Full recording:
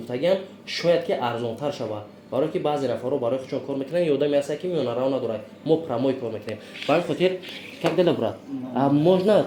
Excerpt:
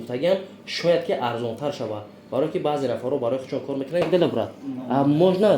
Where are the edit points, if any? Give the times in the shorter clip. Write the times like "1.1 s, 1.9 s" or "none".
4.0 s